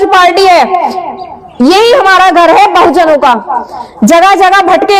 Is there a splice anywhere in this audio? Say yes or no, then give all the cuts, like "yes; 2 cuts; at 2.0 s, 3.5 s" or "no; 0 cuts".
no; 0 cuts